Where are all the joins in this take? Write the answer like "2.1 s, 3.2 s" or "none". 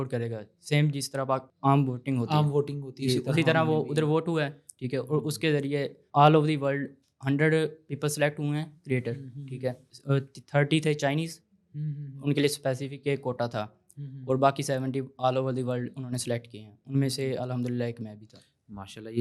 none